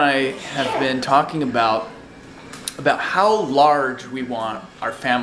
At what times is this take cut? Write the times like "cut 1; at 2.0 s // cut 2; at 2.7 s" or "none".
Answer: none